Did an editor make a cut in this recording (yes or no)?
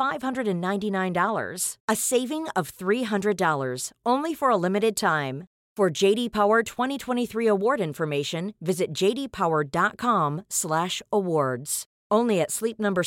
no